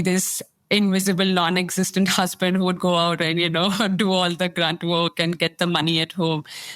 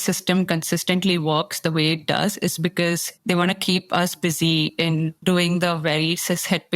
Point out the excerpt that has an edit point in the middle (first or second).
second